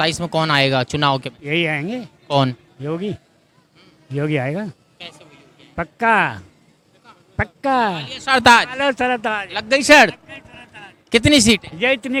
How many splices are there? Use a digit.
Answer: 0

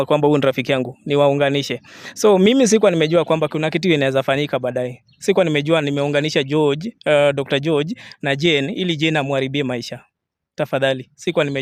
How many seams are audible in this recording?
0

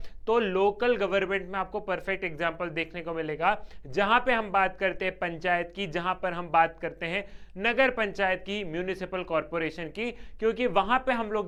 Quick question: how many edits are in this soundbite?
0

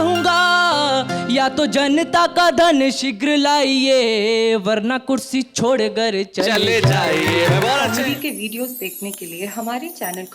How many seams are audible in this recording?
1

